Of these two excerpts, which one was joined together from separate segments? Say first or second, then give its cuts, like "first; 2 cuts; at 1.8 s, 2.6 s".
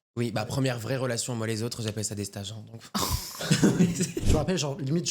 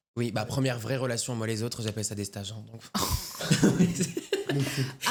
first; 1 cut; at 4.2 s